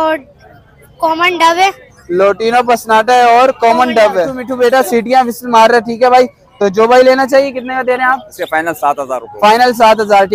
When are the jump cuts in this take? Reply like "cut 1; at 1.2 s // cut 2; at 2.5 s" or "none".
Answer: cut 1; at 4.4 s